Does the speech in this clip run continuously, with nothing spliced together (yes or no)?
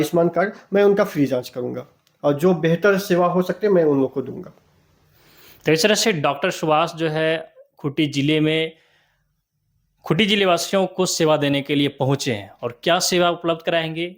yes